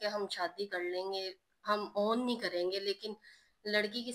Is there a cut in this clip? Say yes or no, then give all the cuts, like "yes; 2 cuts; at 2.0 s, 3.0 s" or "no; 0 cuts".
no; 0 cuts